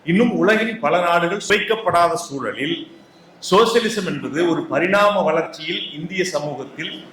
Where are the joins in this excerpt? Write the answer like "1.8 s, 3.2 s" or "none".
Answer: 1.4 s